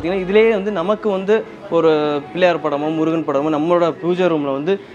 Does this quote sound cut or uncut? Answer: uncut